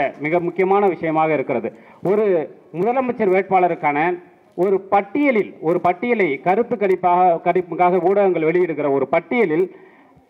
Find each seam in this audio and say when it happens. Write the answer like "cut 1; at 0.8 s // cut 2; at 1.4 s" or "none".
none

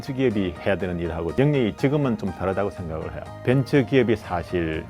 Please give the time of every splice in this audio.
cut 1; at 1.3 s // cut 2; at 3.3 s

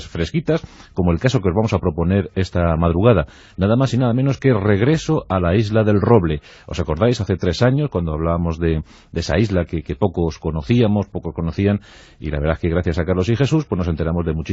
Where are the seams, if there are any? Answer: cut 1; at 6.8 s

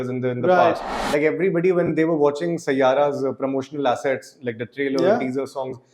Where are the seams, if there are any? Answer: cut 1; at 0.9 s

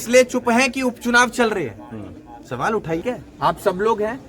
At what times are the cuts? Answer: cut 1; at 3.0 s

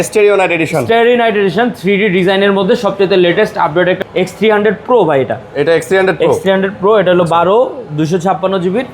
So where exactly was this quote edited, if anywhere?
cut 1; at 4.0 s

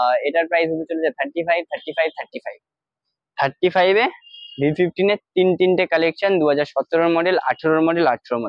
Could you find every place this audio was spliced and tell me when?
none

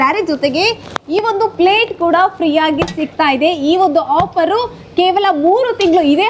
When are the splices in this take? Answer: none

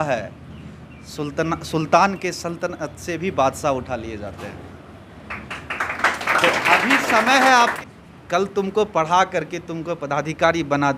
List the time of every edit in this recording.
cut 1; at 7.7 s

